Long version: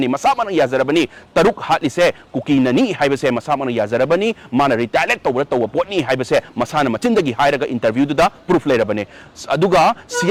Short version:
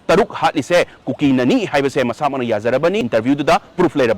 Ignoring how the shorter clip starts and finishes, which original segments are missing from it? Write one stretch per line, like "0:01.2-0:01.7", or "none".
0:04.3-0:07.7